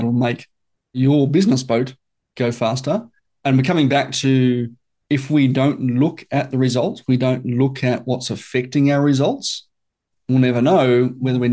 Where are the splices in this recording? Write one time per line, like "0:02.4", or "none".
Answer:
0:01.0